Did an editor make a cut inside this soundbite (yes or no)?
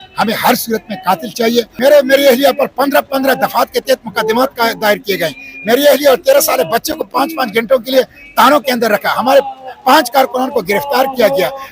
yes